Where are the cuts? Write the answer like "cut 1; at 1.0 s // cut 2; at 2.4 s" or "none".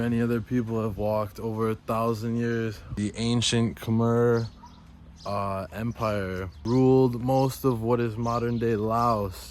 cut 1; at 2.8 s // cut 2; at 6.5 s